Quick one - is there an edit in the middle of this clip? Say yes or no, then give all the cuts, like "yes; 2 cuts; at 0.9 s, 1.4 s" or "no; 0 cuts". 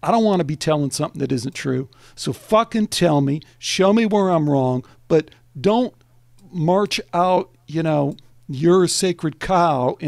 no; 0 cuts